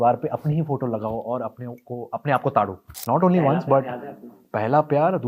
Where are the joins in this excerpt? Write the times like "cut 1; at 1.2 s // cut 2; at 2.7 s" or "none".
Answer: cut 1; at 2.9 s